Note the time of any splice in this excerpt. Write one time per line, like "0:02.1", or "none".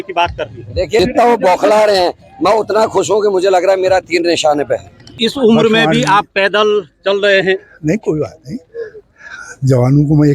0:01.0
0:05.1